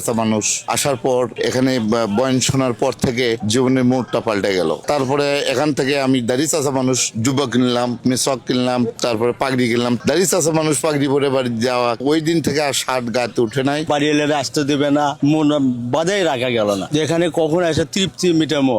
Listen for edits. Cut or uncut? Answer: cut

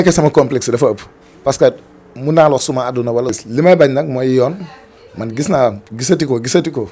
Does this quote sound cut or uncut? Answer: cut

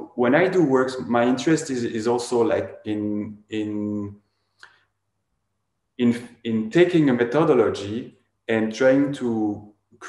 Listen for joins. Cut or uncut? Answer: uncut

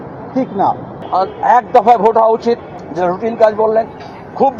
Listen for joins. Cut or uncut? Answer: cut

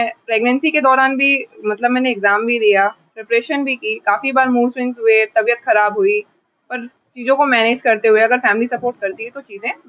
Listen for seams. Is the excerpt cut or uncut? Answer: uncut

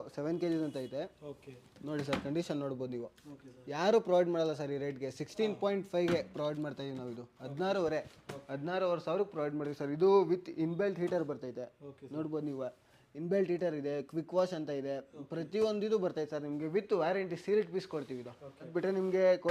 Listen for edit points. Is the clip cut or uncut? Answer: uncut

